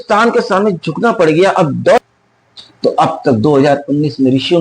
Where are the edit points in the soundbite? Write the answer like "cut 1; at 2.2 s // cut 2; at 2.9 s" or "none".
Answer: cut 1; at 2.0 s